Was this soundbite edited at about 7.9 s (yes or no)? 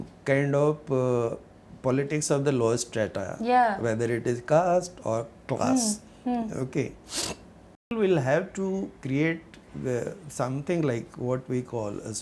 yes